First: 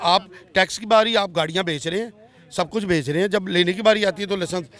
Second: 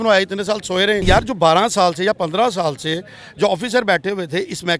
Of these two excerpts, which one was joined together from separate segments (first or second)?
second